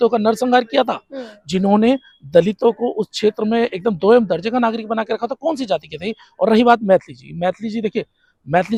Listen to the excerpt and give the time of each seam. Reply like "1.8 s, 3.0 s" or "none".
none